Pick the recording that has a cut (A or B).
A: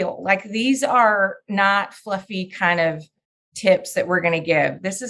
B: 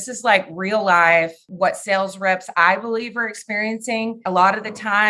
B